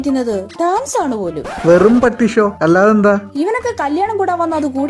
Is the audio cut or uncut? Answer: uncut